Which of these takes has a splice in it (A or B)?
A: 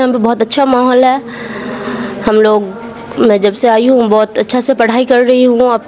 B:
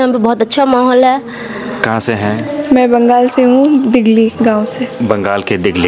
B